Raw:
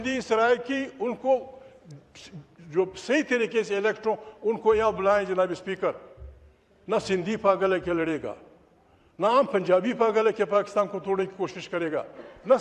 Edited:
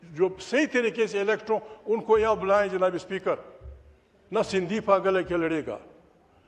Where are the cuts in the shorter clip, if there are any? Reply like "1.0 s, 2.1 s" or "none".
none